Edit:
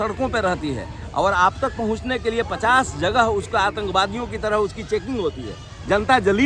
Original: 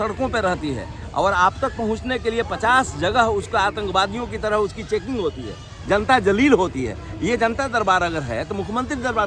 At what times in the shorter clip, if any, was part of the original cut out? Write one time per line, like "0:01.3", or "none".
none